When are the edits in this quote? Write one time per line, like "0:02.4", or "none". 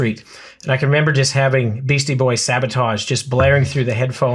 none